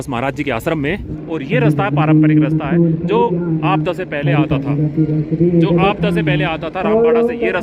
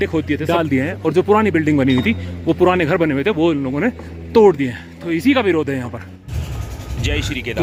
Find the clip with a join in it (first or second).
first